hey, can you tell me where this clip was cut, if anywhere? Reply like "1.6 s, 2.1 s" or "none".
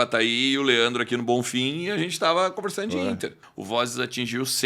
3.4 s